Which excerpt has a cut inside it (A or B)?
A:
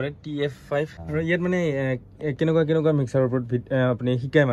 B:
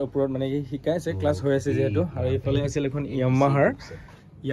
A